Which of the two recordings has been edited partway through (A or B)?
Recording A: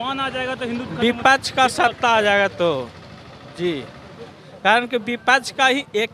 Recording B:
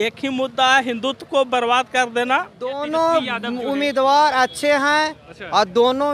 B